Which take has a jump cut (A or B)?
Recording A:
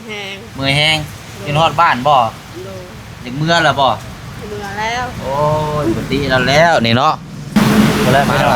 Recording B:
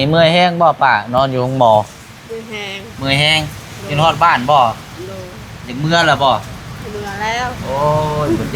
A